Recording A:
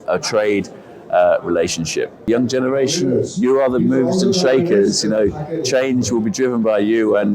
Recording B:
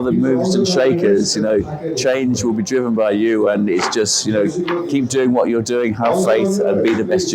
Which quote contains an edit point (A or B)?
A